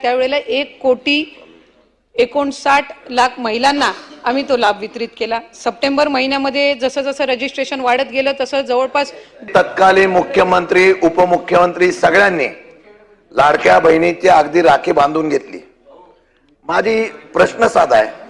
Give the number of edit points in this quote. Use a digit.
1